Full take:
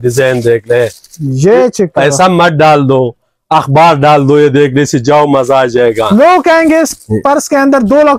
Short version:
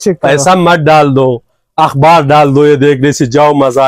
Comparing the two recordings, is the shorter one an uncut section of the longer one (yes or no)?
yes